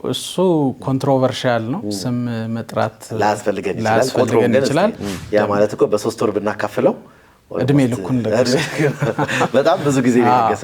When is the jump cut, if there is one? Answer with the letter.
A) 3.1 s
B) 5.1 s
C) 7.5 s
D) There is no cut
B